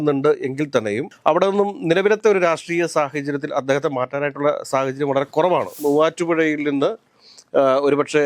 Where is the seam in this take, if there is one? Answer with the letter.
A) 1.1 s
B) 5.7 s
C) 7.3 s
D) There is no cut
B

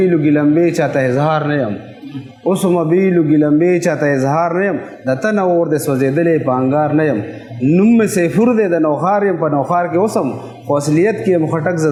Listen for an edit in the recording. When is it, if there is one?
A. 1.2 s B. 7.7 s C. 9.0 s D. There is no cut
D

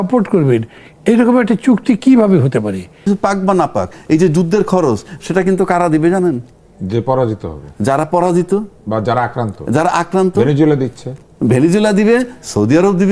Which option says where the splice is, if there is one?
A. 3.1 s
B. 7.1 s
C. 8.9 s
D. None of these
A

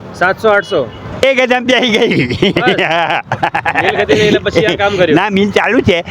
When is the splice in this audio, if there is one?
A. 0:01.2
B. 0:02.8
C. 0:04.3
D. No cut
A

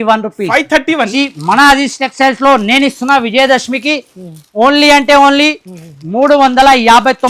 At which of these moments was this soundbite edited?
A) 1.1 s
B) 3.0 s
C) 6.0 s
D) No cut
A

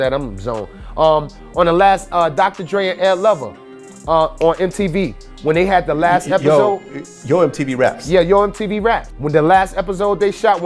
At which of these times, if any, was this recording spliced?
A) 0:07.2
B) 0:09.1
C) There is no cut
B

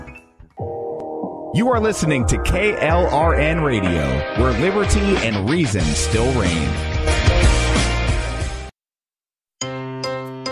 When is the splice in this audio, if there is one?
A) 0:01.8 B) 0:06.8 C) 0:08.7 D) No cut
D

